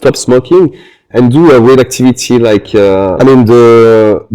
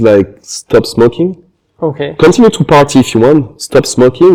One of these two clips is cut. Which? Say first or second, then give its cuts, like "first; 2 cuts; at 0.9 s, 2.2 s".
first; 1 cut; at 3.1 s